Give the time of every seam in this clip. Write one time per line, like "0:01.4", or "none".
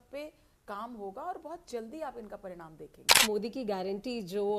0:03.2